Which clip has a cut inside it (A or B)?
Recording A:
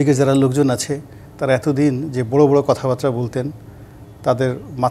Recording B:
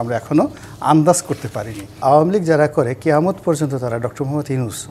B